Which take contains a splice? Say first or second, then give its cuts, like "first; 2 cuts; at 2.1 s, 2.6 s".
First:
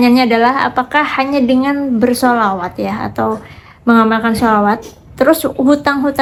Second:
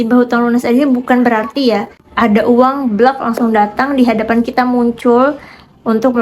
second; 1 cut; at 2.0 s